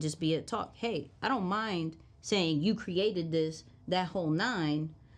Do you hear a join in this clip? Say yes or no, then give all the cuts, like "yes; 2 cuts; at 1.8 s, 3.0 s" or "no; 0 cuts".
no; 0 cuts